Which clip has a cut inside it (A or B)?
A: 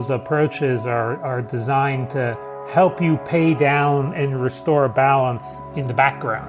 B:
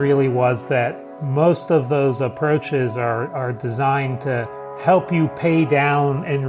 A